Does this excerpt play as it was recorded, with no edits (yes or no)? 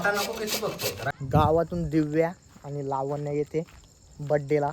no